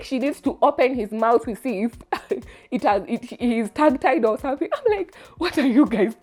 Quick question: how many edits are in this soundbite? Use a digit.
0